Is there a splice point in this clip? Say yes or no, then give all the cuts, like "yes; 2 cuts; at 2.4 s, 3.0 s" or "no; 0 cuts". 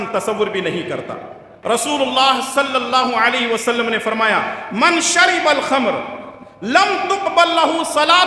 yes; 1 cut; at 1.5 s